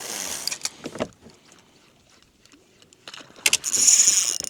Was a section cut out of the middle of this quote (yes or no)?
yes